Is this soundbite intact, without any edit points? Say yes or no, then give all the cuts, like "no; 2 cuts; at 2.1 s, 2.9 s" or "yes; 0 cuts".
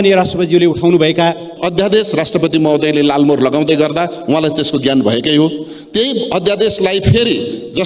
no; 1 cut; at 1.6 s